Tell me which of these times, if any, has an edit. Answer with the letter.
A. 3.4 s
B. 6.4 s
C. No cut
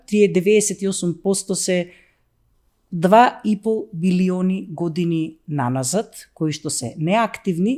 C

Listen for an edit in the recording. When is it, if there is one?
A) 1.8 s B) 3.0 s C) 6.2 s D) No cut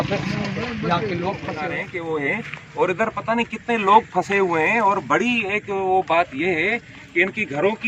A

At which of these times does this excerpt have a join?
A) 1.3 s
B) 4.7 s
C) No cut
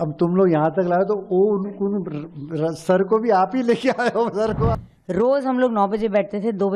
B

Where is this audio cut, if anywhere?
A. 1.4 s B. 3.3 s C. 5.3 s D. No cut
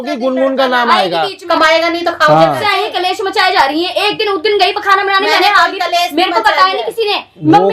A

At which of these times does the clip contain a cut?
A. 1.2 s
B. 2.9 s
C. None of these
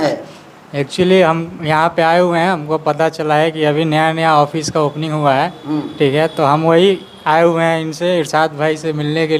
C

